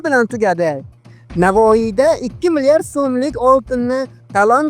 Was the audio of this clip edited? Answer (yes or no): yes